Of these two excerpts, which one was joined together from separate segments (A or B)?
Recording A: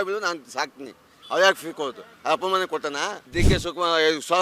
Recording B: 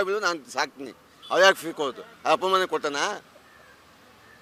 A